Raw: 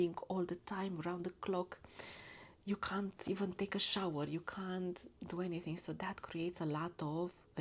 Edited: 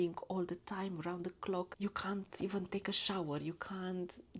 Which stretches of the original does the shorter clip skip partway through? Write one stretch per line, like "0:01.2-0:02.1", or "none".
0:01.7-0:02.6

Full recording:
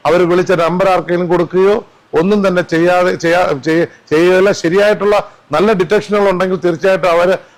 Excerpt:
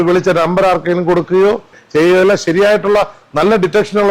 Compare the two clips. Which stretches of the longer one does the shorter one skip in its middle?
0:02.0-0:04.0

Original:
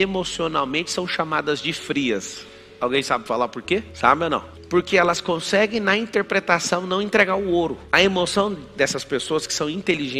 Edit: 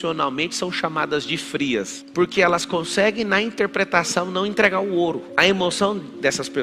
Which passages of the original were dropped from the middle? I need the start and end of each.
0:02.4-0:04.6

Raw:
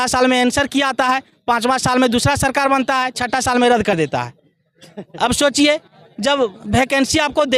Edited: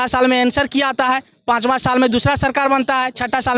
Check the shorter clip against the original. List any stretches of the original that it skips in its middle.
none

